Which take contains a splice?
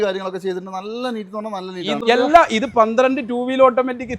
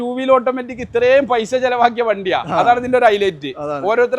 first; 1 cut; at 2.0 s

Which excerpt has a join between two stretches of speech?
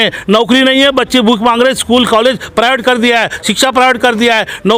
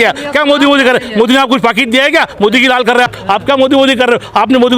second; 1 cut; at 3.2 s

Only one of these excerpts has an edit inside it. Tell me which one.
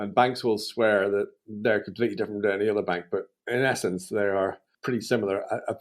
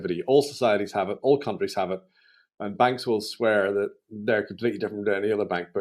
first; 1 cut; at 4.7 s

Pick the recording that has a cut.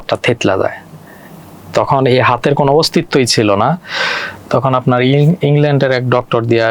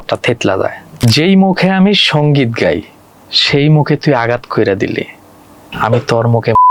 second; 1 cut; at 1.0 s

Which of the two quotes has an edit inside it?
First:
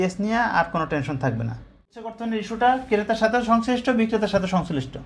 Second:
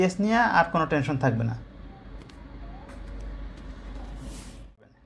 first; 1 cut; at 2.2 s

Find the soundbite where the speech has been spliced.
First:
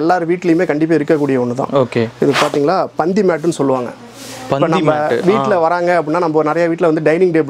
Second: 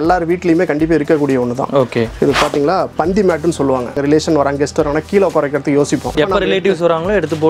second; 2 cuts; at 4.0 s, 6.1 s

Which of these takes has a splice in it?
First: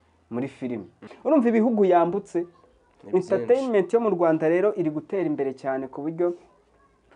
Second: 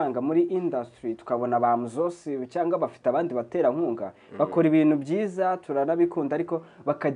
first; 1 cut; at 1.1 s

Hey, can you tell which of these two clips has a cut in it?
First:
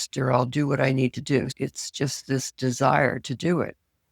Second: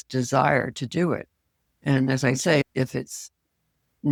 first; 1 cut; at 1.5 s

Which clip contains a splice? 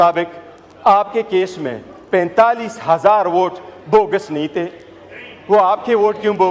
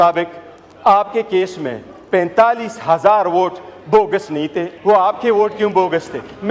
second; 1 cut; at 4.7 s

